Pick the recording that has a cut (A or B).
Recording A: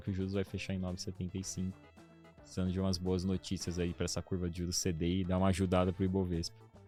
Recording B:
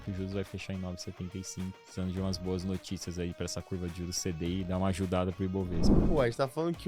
B